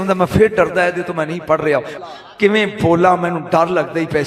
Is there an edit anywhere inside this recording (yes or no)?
yes